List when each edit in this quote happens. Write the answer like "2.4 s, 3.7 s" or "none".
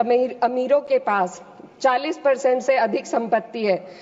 none